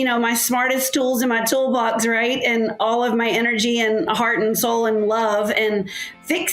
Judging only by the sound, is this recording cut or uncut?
uncut